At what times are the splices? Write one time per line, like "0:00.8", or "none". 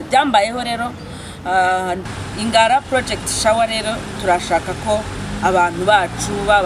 0:02.0